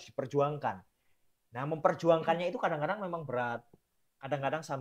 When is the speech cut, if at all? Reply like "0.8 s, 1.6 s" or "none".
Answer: none